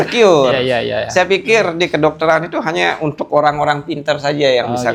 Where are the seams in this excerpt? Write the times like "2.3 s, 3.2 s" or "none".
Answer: none